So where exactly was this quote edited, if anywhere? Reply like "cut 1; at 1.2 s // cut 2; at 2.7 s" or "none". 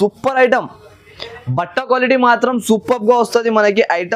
none

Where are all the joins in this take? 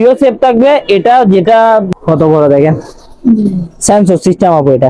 cut 1; at 1.9 s

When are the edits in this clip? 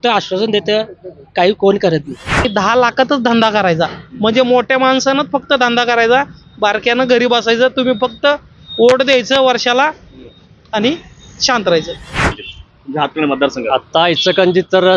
cut 1; at 2.5 s // cut 2; at 12.3 s

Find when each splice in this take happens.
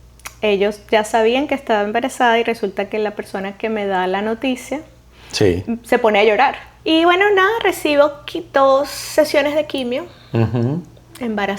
cut 1; at 6.7 s

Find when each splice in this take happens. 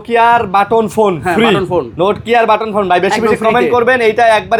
none

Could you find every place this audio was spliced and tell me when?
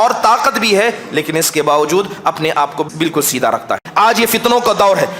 cut 1; at 2.9 s // cut 2; at 3.9 s

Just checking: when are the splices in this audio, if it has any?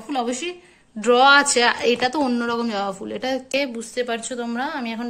cut 1; at 3.5 s

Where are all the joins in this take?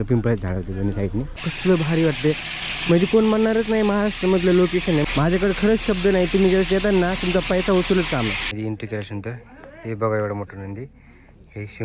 cut 1; at 1.5 s // cut 2; at 5.0 s // cut 3; at 8.5 s

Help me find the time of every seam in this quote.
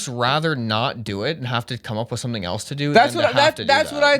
none

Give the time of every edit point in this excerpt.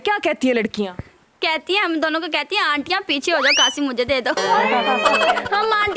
none

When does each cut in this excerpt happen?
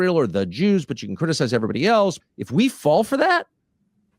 cut 1; at 2.2 s

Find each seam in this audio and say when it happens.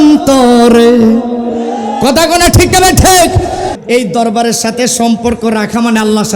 cut 1; at 3.7 s

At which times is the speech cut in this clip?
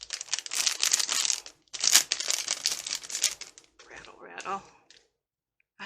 none

